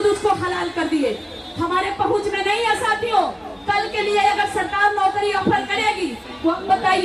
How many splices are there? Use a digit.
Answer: 0